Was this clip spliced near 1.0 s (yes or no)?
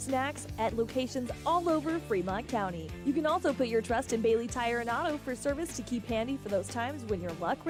no